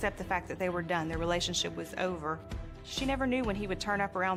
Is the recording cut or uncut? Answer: uncut